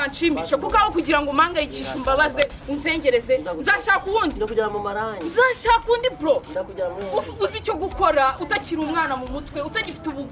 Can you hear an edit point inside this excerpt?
no; 0 cuts

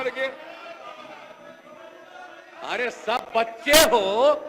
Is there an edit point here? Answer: no; 0 cuts

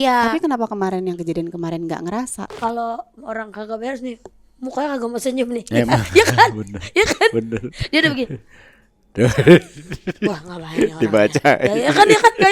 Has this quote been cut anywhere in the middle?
yes; 1 cut; at 2.4 s

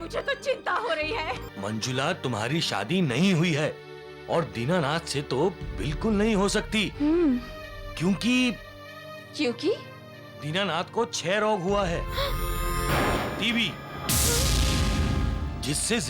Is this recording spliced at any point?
yes; 2 cuts; at 1.5 s, 13.2 s

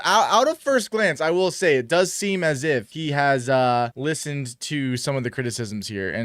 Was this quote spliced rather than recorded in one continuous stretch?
yes; 2 cuts; at 2.9 s, 4.0 s

